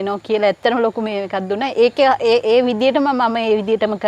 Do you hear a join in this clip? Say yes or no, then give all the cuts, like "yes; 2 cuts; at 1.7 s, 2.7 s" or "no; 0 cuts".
no; 0 cuts